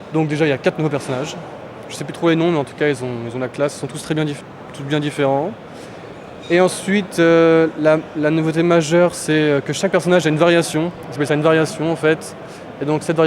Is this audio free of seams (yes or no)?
no